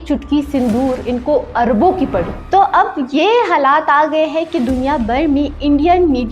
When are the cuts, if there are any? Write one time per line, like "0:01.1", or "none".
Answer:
0:02.4